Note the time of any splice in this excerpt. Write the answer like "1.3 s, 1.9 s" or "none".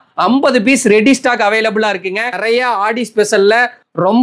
2.3 s